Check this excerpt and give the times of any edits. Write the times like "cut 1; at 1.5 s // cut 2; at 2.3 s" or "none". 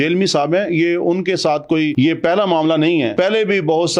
cut 1; at 1.9 s // cut 2; at 3.1 s